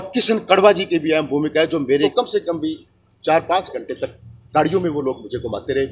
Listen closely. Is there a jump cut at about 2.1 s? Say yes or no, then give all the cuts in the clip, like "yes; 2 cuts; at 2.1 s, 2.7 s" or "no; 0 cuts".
yes; 1 cut; at 2.1 s